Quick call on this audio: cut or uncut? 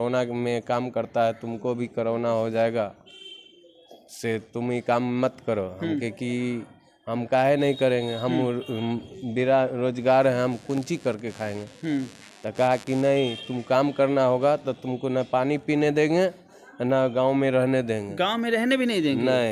uncut